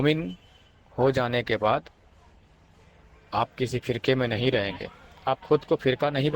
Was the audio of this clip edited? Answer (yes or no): no